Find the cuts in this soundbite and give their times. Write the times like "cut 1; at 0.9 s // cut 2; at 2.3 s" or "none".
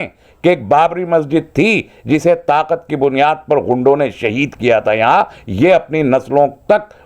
none